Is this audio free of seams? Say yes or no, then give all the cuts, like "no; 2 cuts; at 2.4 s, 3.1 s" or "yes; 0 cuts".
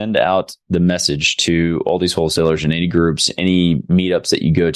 yes; 0 cuts